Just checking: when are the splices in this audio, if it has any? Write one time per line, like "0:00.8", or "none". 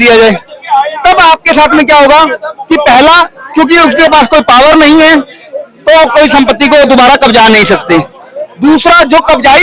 none